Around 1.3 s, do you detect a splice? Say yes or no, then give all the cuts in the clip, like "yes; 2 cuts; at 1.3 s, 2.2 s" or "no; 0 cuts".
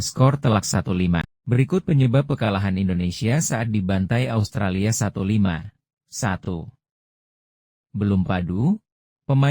yes; 1 cut; at 1.3 s